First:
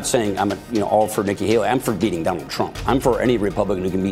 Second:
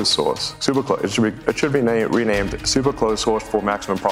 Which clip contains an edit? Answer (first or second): second